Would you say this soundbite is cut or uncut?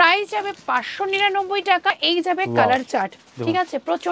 cut